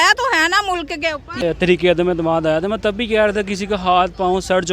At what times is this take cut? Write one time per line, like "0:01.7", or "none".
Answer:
0:01.3